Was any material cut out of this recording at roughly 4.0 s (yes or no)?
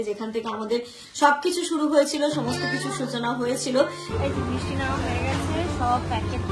yes